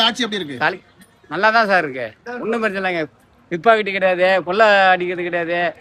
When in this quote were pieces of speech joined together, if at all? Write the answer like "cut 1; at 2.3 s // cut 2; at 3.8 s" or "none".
none

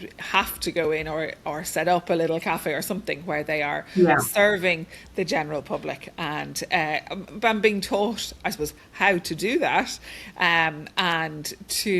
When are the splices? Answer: none

